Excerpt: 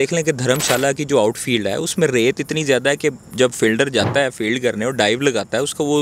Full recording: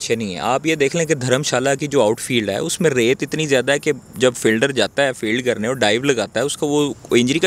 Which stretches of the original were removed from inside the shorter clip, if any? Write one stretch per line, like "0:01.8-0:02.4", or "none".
none